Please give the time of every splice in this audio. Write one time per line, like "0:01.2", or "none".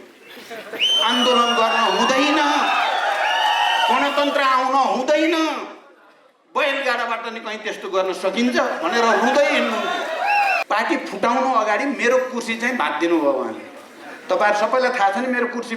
0:10.6